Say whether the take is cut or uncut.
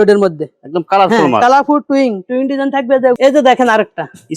cut